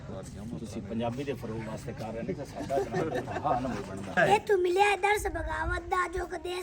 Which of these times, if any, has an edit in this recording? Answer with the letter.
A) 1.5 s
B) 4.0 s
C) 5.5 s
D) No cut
B